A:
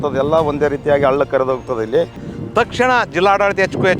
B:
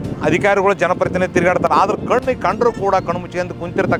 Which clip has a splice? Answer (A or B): A